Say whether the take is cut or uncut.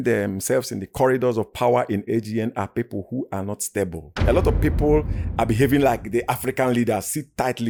uncut